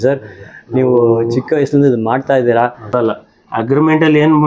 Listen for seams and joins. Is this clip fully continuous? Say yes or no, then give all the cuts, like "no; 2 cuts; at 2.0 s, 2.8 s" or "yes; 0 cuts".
no; 1 cut; at 2.9 s